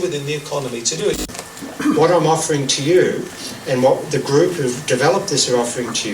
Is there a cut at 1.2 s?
yes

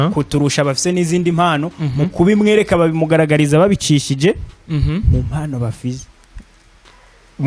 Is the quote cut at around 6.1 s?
no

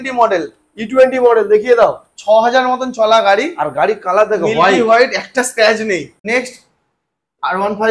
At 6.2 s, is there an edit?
yes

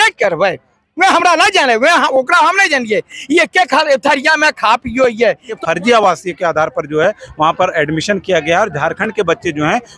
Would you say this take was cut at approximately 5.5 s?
yes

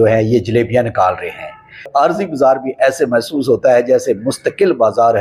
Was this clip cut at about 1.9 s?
yes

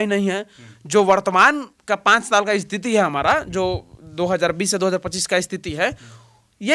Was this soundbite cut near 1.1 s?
no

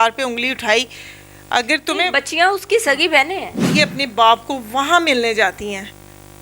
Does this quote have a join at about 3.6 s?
yes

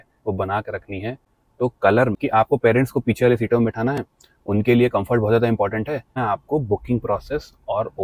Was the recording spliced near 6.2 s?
yes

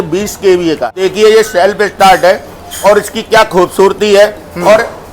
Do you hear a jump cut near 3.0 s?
no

